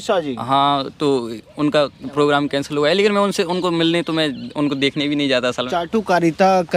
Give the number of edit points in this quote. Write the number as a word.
one